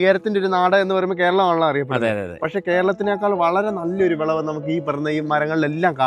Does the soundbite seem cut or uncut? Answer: uncut